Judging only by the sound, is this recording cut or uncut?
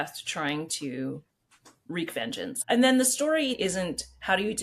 cut